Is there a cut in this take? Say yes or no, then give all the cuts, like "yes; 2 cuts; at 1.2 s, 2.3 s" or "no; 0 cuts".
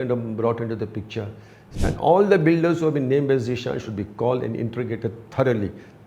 yes; 1 cut; at 1.6 s